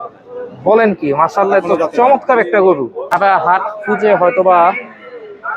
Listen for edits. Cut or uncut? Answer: cut